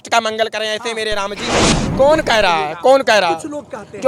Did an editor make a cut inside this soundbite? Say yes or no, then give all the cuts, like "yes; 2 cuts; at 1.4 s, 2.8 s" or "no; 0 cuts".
yes; 1 cut; at 1.8 s